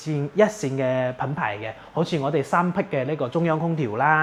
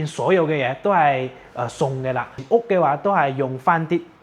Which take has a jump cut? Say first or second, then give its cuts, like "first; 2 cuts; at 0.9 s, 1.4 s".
second; 1 cut; at 2.3 s